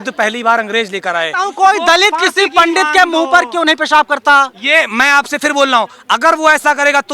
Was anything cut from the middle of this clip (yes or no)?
yes